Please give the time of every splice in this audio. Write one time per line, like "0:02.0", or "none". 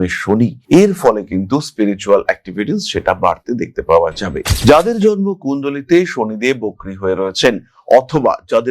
0:04.3